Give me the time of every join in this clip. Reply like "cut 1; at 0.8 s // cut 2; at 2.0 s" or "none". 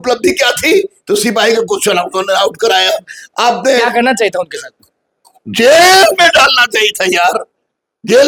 none